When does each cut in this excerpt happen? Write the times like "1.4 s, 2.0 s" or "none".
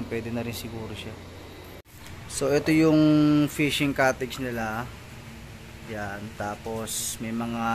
1.8 s